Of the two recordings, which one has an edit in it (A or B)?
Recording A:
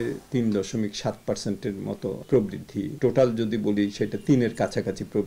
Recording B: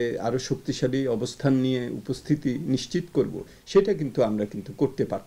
A